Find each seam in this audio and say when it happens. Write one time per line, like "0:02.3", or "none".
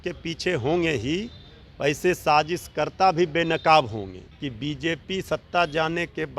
0:04.2

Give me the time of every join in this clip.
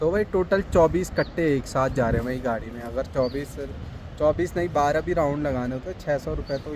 none

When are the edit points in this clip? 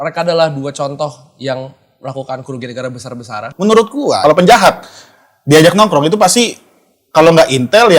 0:03.5
0:04.2

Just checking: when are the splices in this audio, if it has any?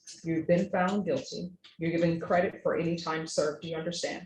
none

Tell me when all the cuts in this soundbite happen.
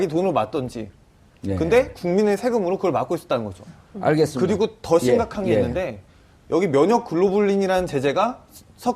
0:05.5

